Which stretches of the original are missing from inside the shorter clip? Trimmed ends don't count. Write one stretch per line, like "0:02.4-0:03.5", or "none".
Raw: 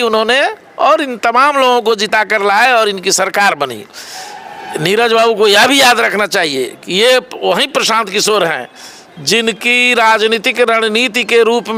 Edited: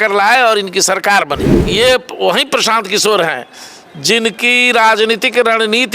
0:03.9-0:06.8